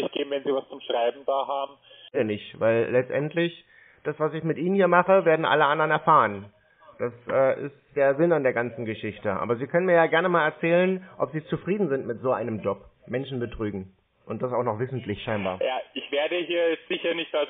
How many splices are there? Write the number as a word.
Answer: one